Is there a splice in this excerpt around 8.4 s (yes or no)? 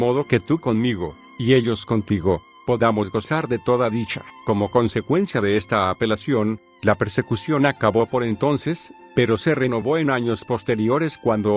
no